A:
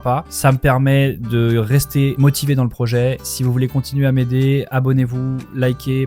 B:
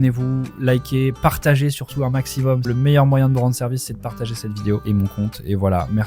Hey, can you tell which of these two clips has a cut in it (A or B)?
B